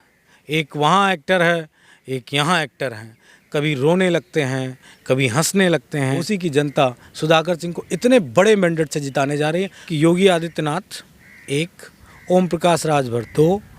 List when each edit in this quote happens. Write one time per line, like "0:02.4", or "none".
0:06.2
0:09.8